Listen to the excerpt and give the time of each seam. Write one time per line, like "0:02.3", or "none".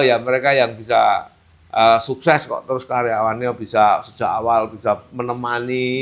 none